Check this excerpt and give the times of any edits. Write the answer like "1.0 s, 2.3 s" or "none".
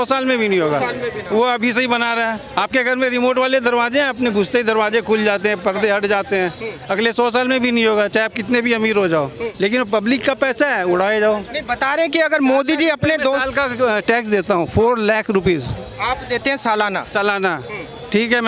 2.4 s, 9.4 s